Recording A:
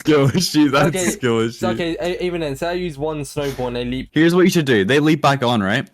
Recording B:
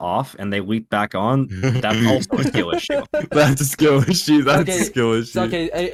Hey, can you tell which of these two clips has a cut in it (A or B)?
A